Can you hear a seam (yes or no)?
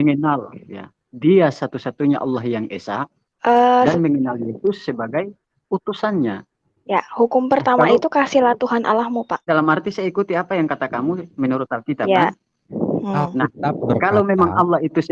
yes